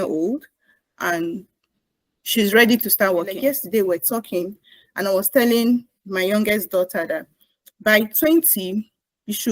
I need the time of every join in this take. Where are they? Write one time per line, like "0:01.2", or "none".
0:03.4